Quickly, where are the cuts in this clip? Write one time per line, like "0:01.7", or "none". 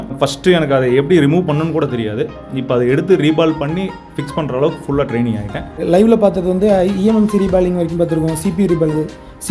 0:05.8